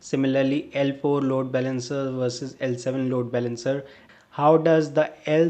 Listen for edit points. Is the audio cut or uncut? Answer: cut